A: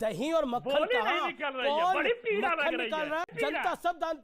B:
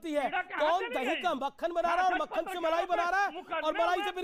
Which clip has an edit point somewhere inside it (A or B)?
A